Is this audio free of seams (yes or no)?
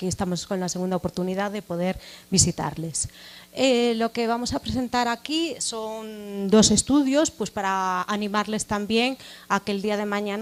yes